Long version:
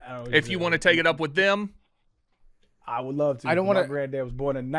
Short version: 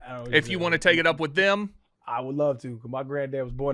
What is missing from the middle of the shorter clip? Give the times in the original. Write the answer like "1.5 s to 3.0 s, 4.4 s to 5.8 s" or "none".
1.9 s to 2.7 s